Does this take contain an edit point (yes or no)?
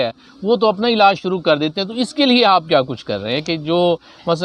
no